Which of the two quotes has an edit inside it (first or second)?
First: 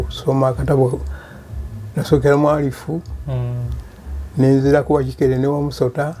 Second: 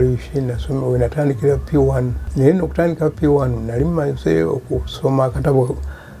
second